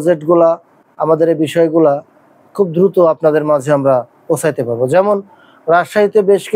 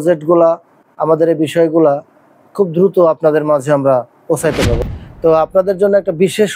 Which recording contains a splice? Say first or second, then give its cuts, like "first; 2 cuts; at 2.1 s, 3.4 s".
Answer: second; 1 cut; at 4.8 s